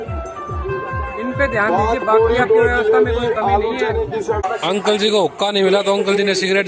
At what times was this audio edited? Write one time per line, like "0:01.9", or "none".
0:04.4